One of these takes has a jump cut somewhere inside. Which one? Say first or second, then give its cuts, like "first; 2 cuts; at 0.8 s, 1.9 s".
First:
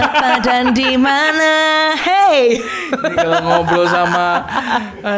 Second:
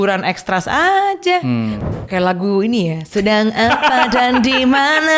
second; 1 cut; at 1.8 s